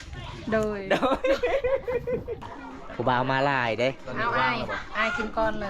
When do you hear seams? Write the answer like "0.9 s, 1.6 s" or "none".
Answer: 2.6 s